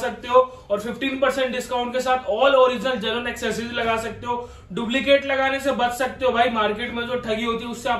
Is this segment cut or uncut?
uncut